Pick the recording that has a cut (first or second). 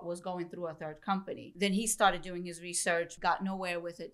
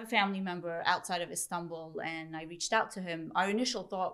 first